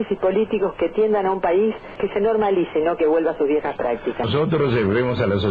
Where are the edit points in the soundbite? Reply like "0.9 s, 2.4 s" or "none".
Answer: 4.3 s